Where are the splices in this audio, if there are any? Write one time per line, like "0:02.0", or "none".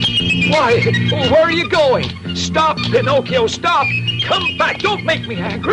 none